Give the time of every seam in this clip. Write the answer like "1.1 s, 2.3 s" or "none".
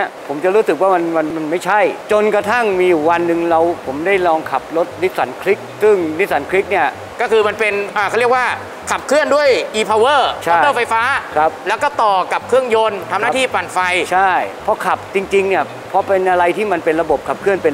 none